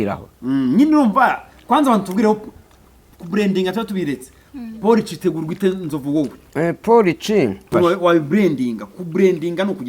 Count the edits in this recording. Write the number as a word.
one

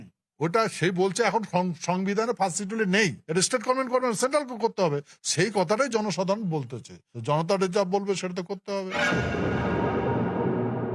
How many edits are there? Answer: one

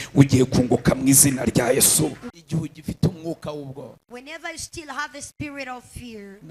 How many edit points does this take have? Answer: one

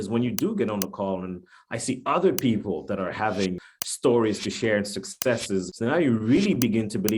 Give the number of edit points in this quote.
two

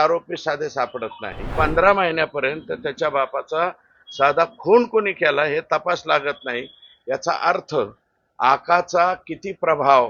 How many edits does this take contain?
one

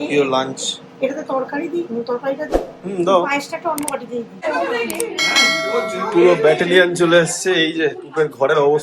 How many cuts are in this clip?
one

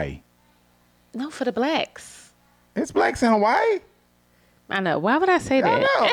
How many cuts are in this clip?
zero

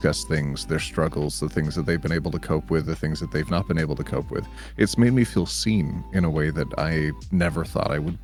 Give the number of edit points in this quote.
zero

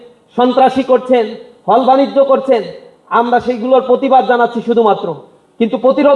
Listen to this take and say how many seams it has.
zero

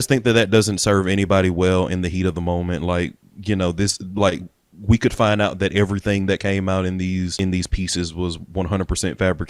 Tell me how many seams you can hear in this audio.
one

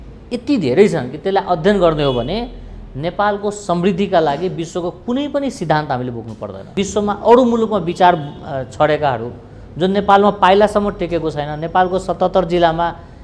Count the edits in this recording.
one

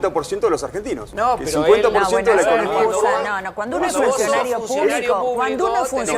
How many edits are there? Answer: one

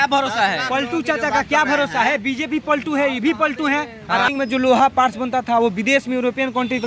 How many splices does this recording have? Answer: one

